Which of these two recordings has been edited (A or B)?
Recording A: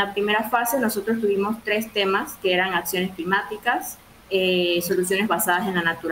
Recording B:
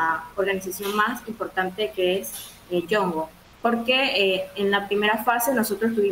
B